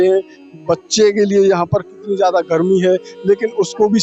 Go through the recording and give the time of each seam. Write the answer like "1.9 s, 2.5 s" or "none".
none